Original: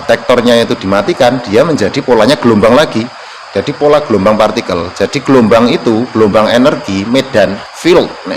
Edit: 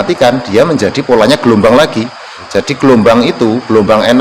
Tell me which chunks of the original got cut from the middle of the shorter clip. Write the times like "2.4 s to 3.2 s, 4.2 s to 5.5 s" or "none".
3.4 s to 4.8 s